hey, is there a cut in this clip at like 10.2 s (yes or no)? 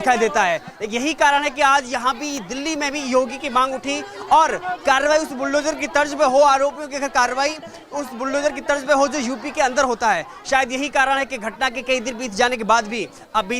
no